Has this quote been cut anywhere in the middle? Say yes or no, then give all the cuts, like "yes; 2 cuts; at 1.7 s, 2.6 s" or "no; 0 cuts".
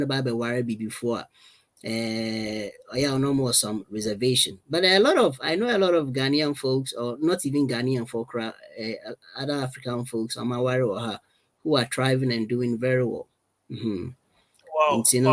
no; 0 cuts